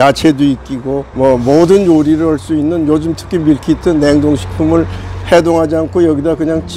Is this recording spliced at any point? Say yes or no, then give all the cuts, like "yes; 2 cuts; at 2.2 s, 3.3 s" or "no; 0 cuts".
no; 0 cuts